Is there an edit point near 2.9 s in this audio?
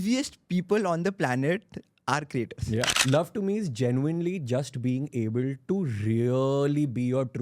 yes; 1 cut; at 2.9 s

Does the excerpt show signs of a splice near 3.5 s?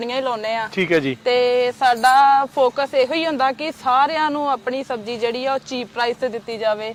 no; 0 cuts

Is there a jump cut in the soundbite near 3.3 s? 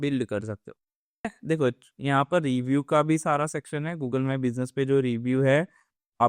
no; 1 cut; at 1.3 s

